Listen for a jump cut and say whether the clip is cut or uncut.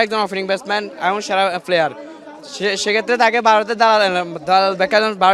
uncut